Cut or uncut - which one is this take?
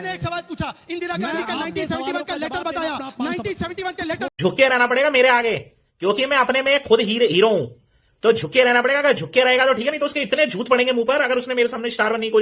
uncut